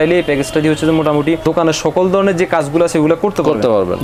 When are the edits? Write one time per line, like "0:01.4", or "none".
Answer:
none